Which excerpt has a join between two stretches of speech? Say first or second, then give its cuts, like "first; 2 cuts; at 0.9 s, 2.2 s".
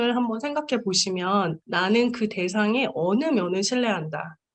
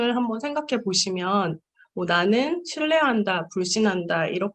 first; 1 cut; at 1.6 s